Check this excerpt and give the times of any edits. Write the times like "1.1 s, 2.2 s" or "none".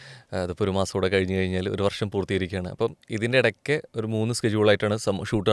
none